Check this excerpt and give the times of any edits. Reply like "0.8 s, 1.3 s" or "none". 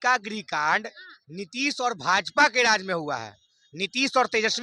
none